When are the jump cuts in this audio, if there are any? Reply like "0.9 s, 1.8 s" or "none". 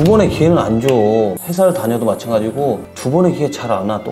none